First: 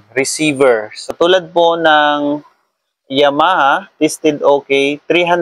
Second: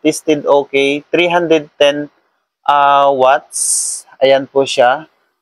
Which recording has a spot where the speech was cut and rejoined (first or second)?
first